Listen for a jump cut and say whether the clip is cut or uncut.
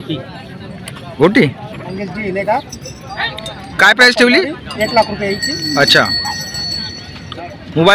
cut